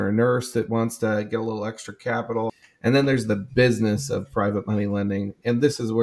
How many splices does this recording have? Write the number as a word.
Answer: one